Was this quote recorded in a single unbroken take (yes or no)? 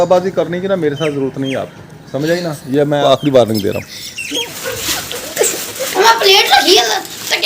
no